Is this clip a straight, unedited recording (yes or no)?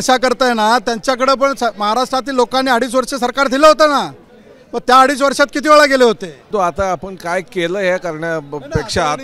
no